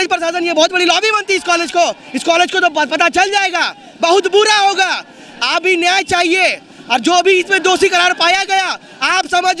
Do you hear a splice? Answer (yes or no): no